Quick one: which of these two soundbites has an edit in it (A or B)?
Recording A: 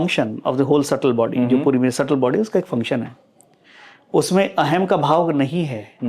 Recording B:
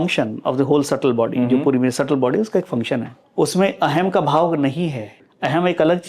B